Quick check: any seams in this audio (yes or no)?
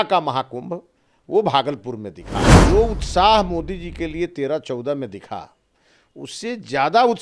yes